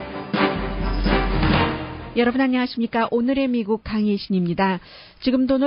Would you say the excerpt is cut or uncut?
uncut